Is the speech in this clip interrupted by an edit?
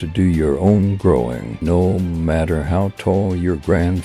yes; 1 cut; at 1.5 s

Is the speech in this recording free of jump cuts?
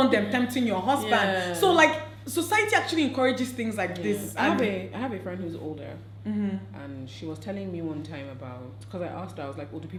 yes; 0 cuts

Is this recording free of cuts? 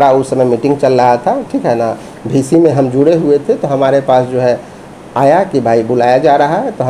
yes; 0 cuts

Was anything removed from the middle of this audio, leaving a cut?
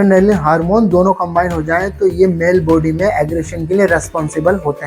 no; 0 cuts

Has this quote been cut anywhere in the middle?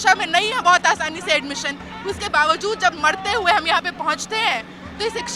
no; 0 cuts

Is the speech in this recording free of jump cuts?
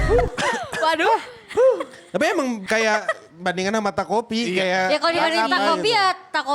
no; 1 cut; at 2.6 s

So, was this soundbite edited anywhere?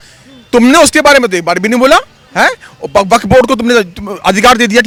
no; 0 cuts

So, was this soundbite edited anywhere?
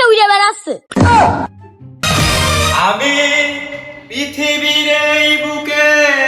yes; 1 cut; at 2.0 s

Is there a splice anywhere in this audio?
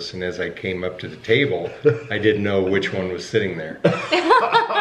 no; 0 cuts

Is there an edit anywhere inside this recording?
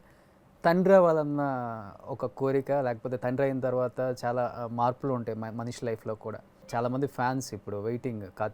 yes; 1 cut; at 6.5 s

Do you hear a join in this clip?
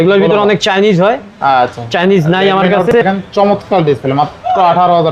yes; 1 cut; at 3.0 s

